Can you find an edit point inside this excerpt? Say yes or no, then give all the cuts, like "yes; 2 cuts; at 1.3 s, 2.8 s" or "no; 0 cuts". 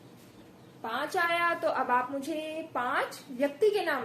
no; 0 cuts